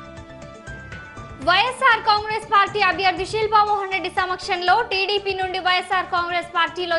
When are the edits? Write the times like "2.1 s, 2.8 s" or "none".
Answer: none